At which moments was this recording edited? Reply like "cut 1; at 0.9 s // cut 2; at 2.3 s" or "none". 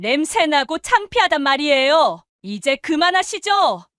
cut 1; at 2.3 s